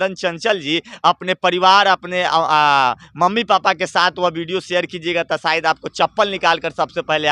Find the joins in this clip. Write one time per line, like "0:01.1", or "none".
none